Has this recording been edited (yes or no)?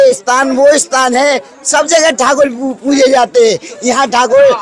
no